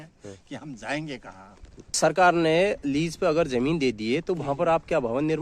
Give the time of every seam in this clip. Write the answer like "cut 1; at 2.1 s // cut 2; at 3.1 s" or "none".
cut 1; at 2.0 s